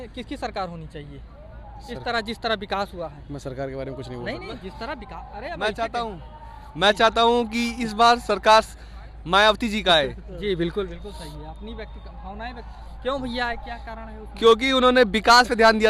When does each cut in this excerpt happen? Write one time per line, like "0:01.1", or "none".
none